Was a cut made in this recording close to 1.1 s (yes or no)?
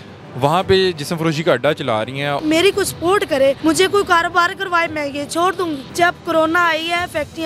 no